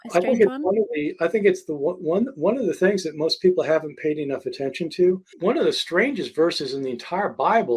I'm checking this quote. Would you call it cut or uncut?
cut